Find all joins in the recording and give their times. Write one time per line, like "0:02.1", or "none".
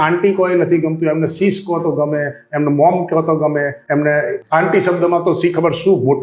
0:03.8
0:04.4